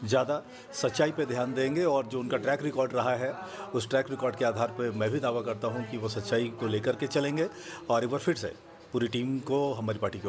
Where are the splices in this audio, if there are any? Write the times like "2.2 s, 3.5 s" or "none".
none